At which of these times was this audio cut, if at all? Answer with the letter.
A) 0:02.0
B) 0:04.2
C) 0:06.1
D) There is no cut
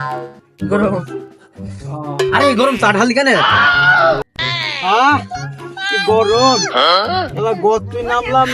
B